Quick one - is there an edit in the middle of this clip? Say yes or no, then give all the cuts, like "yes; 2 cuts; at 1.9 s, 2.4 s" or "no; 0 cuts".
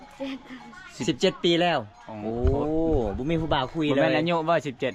no; 0 cuts